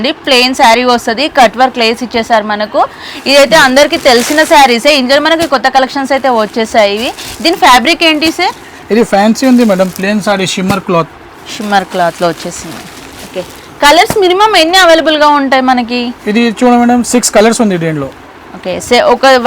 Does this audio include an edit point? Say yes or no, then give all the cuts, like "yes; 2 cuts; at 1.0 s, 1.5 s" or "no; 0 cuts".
no; 0 cuts